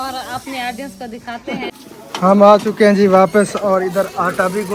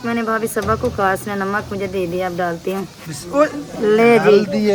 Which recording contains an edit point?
first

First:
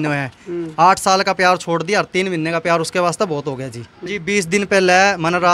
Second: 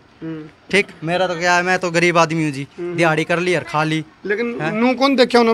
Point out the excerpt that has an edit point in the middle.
first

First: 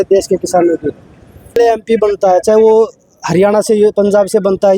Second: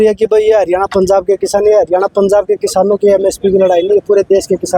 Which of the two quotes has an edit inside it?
first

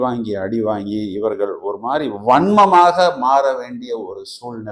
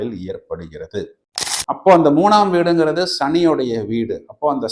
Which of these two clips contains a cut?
second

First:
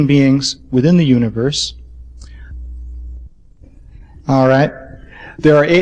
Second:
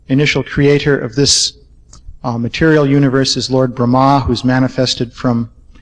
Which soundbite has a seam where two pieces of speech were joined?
second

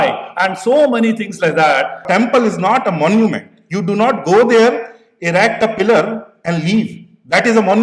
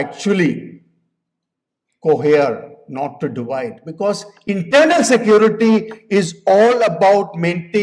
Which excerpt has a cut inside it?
first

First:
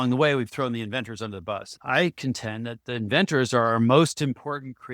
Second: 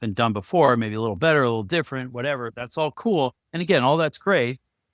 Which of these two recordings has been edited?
first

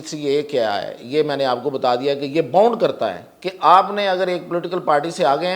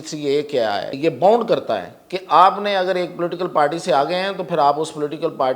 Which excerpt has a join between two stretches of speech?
second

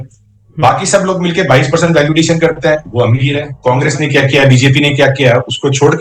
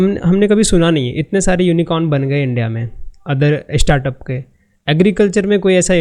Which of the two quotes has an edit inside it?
first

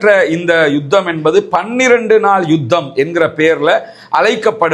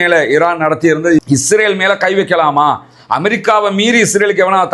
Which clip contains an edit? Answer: second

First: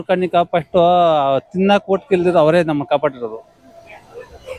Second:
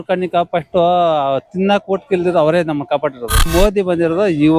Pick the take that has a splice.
second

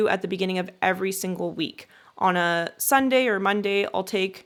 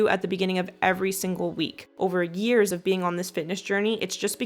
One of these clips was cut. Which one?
second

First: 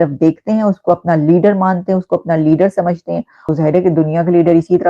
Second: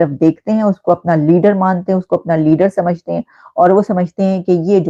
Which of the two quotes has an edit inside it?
first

